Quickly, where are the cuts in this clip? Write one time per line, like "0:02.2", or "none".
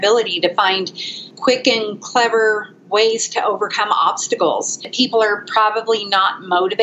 0:01.3
0:04.8